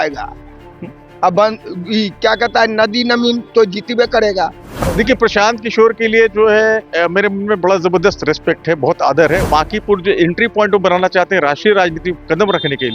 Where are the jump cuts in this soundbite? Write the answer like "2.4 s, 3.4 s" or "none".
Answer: 4.7 s, 9.4 s